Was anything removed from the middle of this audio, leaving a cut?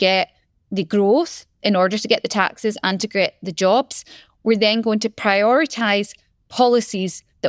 no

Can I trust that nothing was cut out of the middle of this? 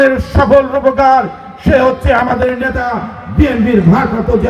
yes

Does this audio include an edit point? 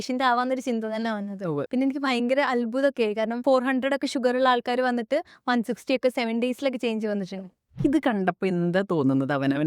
yes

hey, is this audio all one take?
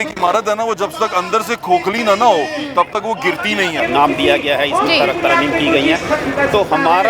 no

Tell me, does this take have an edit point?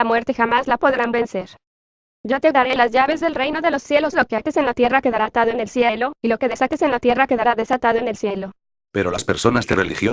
no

